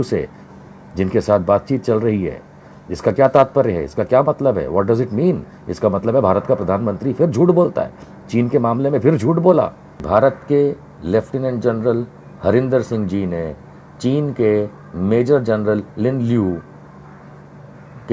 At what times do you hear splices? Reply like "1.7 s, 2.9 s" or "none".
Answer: 10.0 s

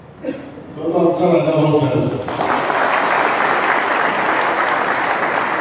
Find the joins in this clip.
none

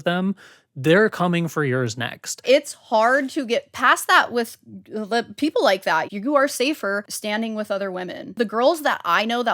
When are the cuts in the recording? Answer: 2.4 s, 6.1 s, 7.1 s, 8.4 s

